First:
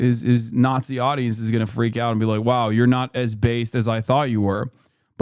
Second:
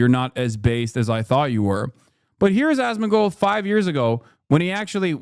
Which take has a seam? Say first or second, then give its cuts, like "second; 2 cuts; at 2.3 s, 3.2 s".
first; 1 cut; at 1.7 s